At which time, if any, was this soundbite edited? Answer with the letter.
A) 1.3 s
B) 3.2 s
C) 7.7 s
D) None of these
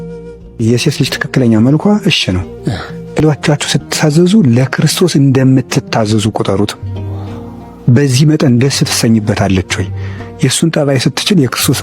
B